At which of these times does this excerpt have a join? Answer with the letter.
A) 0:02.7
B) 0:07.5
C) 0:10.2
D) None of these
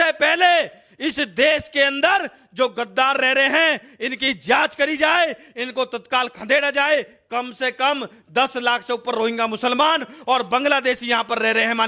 D